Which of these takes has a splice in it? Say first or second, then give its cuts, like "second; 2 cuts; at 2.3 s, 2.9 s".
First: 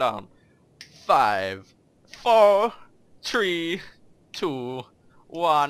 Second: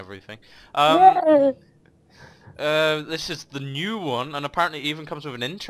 second; 1 cut; at 3.6 s